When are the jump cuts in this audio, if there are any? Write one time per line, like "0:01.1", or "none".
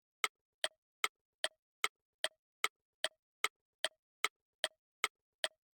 0:04.4